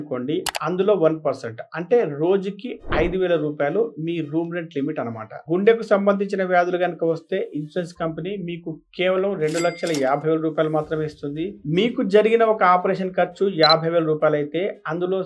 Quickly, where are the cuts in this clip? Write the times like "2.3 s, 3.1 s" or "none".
5.3 s, 11.6 s

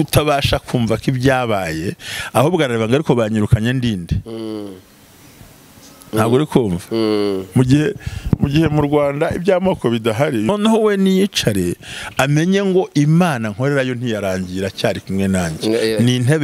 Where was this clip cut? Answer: 10.5 s

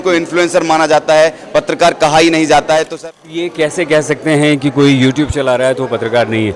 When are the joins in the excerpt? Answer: 3.3 s

